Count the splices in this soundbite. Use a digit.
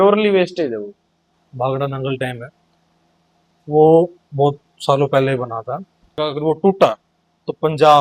2